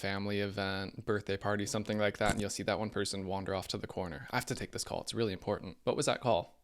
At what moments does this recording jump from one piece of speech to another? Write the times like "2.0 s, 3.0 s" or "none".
0.9 s, 5.7 s